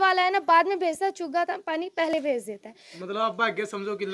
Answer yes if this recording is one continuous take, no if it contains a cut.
yes